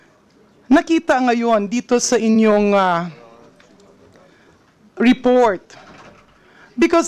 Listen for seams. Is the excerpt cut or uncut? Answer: uncut